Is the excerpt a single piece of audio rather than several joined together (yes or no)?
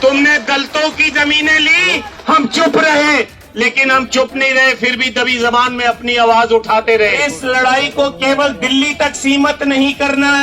no